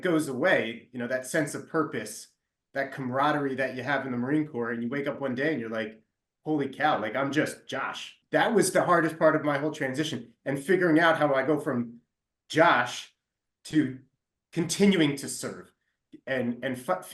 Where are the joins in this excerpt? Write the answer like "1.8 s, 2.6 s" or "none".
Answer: 8.1 s